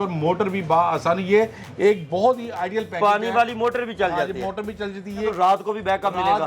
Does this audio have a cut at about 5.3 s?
yes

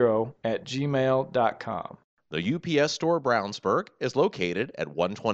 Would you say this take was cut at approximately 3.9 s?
no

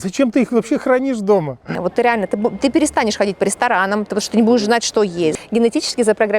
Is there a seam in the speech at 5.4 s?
yes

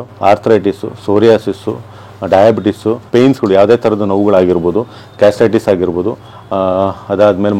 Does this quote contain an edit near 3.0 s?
yes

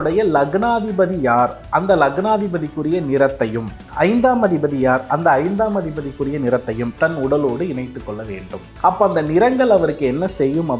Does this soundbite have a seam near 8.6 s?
yes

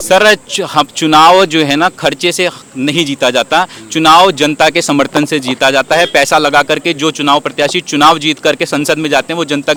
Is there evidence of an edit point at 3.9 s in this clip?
no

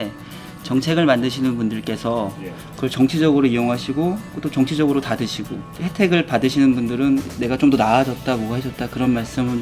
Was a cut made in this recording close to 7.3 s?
yes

